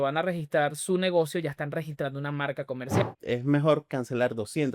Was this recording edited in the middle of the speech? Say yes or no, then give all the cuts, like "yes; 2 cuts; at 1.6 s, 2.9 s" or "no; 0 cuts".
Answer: yes; 1 cut; at 3.0 s